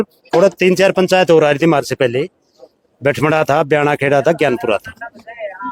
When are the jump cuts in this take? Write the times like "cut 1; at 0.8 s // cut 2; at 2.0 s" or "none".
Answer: none